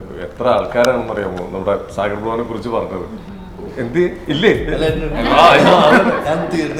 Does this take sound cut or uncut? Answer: uncut